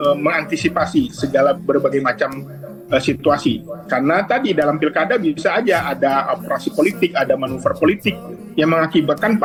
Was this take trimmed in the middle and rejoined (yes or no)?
no